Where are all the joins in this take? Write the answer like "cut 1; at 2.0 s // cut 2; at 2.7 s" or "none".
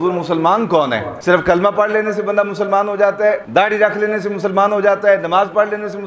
cut 1; at 1.1 s // cut 2; at 3.4 s